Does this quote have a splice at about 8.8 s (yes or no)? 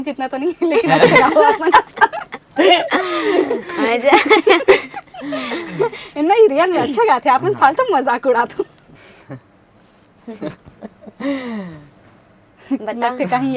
yes